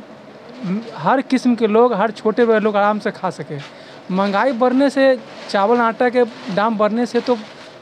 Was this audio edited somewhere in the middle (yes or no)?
no